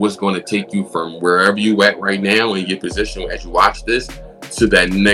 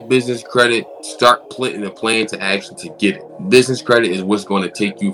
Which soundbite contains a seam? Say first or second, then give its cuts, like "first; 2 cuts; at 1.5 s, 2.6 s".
second; 2 cuts; at 1.4 s, 3.3 s